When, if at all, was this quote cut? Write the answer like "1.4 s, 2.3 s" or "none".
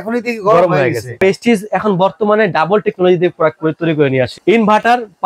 1.2 s, 4.4 s